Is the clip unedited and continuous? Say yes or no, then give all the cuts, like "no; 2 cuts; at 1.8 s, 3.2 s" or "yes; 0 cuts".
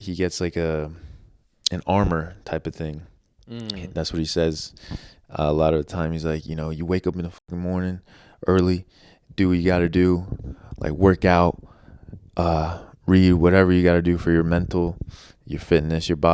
yes; 0 cuts